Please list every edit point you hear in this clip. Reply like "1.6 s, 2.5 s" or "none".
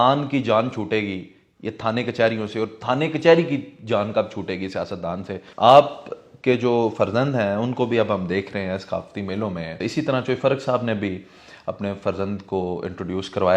5.4 s, 9.8 s

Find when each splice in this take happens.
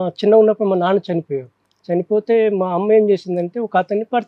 none

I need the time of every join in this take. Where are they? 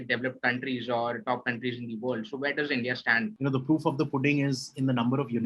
3.3 s

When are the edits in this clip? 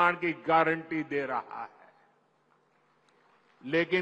none

